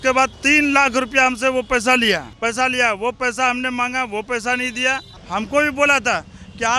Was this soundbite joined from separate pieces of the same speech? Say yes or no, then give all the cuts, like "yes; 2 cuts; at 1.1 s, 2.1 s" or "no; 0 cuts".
yes; 2 cuts; at 2.3 s, 5.2 s